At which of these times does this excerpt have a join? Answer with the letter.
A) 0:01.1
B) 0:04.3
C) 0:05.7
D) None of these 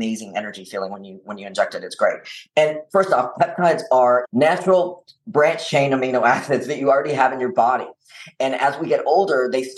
B